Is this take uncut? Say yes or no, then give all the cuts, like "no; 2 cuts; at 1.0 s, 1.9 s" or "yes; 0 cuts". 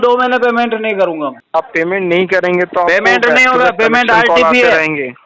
no; 1 cut; at 1.4 s